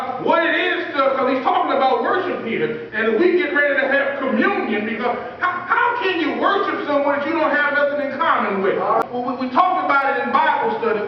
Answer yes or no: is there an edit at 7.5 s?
no